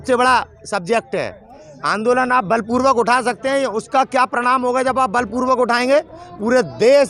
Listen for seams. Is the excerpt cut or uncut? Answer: uncut